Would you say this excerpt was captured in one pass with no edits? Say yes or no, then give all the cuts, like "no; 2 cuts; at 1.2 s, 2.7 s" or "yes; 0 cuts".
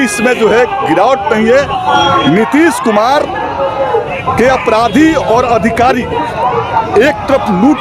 no; 1 cut; at 1.8 s